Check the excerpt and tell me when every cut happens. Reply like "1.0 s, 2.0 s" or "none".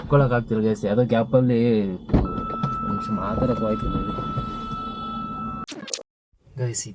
6.0 s